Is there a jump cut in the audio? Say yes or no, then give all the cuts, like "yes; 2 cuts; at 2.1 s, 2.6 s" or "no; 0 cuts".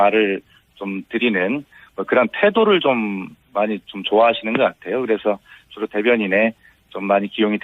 yes; 1 cut; at 2.3 s